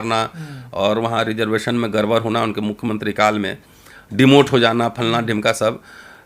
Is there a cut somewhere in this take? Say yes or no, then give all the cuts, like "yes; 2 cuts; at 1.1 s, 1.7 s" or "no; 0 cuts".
no; 0 cuts